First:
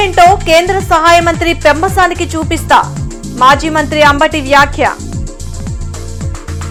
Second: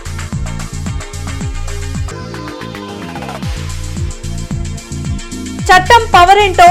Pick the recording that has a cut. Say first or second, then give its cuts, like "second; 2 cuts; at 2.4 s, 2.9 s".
second; 2 cuts; at 4.1 s, 5.4 s